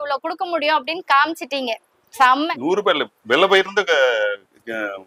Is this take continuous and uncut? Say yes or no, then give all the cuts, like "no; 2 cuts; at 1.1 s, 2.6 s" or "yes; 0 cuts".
yes; 0 cuts